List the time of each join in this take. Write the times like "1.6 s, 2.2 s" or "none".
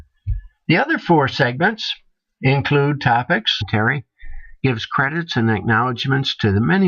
none